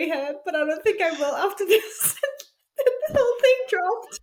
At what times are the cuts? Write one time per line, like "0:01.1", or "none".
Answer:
none